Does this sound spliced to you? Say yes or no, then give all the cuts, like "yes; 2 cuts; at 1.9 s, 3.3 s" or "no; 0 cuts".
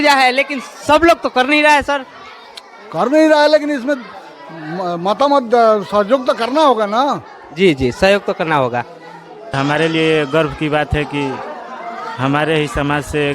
yes; 1 cut; at 9.5 s